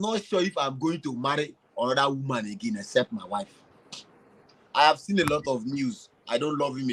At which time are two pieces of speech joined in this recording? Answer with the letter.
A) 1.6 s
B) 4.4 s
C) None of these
B